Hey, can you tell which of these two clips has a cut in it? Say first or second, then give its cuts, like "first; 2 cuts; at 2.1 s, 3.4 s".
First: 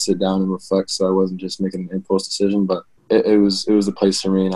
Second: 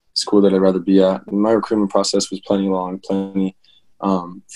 first; 1 cut; at 2.9 s